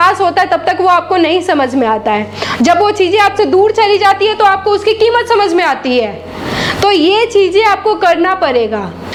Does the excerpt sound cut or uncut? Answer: uncut